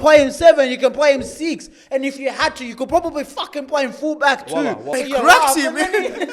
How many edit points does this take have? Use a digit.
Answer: 1